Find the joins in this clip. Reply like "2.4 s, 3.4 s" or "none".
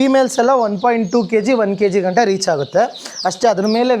none